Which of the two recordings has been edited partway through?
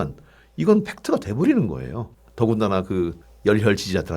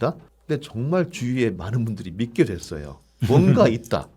first; 1 cut; at 3.2 s

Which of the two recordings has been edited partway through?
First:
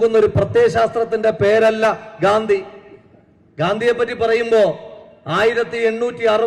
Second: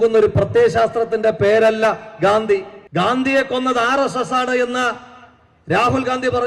second; 1 cut; at 2.8 s

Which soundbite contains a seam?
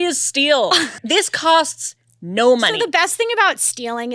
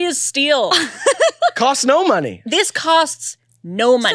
first; 1 cut; at 0.9 s

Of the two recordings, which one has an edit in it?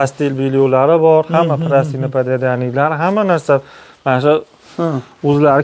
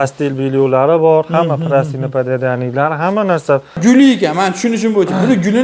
second; 1 cut; at 3.8 s

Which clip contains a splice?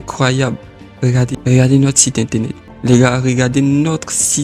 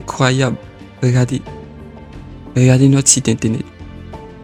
first; 2 cuts; at 1.4 s, 2.6 s

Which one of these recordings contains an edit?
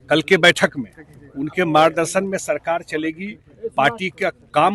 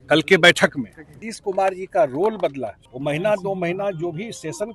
second; 2 cuts; at 1.2 s, 2.8 s

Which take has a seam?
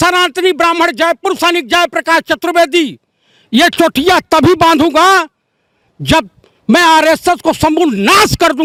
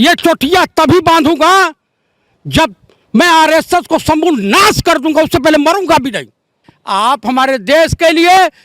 second; 1 cut; at 6.6 s

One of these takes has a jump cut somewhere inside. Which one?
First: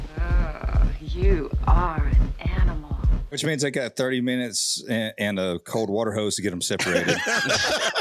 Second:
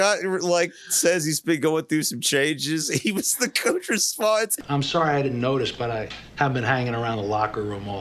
first; 1 cut; at 3.4 s

